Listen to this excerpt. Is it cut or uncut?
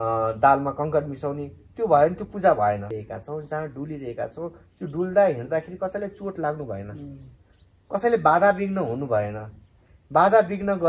cut